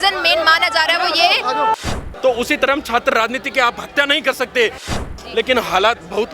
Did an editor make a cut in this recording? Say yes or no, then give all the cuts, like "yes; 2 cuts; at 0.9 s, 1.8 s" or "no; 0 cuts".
yes; 2 cuts; at 1.8 s, 5.1 s